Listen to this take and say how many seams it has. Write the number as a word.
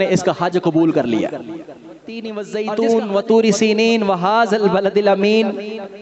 one